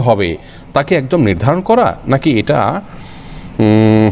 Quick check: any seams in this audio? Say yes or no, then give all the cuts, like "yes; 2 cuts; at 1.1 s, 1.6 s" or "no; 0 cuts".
no; 0 cuts